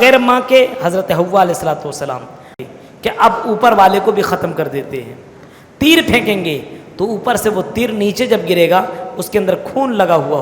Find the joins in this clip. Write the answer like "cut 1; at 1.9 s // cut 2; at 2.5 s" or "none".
cut 1; at 2.5 s